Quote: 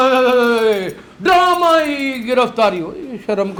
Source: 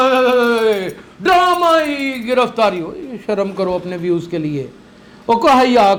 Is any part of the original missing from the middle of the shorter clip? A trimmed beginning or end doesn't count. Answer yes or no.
no